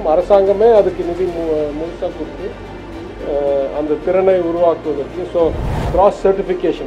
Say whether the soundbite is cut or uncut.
cut